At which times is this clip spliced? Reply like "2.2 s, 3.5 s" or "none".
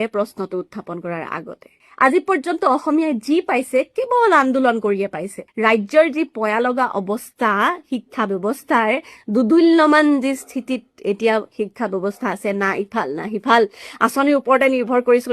1.8 s, 5.4 s